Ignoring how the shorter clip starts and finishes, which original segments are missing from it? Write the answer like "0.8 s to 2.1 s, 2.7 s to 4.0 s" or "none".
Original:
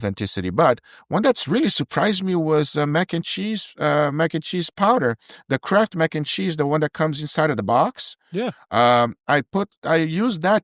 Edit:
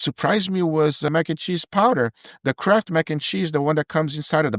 2.8 s to 4.1 s